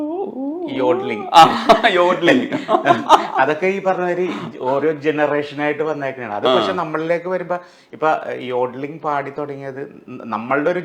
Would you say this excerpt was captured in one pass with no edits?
yes; 0 cuts

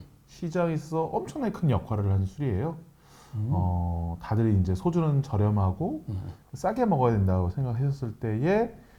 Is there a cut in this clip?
no; 0 cuts

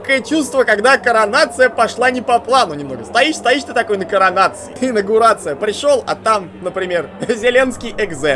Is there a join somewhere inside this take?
yes; 1 cut; at 4.8 s

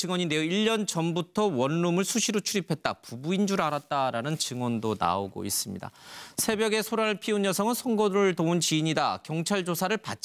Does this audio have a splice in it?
no; 0 cuts

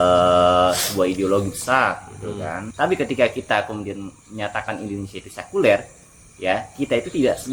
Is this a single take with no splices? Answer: no; 1 cut; at 2.6 s

